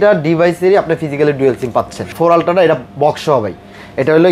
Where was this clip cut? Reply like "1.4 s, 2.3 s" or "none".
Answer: 2.1 s